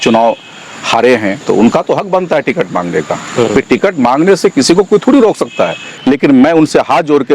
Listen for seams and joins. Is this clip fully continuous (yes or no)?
no